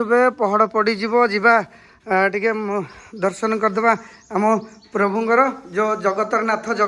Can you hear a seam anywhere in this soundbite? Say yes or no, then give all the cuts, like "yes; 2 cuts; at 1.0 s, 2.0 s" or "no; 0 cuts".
no; 0 cuts